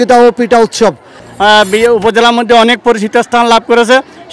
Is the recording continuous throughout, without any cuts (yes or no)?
no